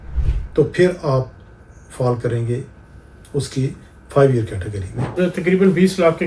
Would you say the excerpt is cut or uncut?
cut